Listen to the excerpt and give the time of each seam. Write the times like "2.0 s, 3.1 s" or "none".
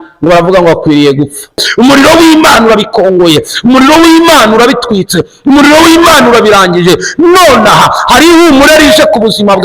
1.7 s